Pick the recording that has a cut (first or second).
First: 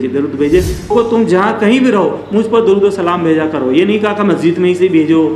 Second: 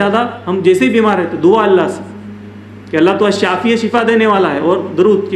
first